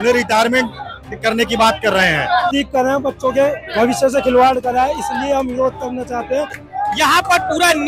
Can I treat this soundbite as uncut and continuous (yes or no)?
no